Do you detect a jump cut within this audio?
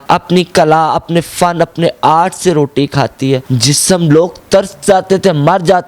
no; 0 cuts

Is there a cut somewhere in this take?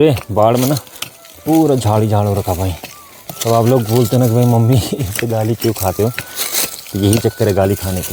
no; 0 cuts

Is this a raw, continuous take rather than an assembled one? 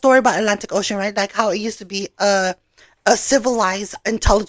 yes; 0 cuts

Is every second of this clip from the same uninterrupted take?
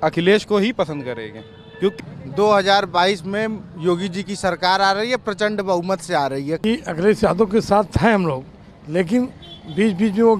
no; 2 cuts; at 2.0 s, 6.6 s

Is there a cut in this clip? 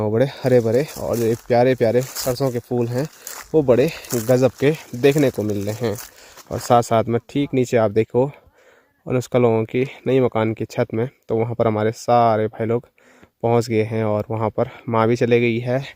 no; 0 cuts

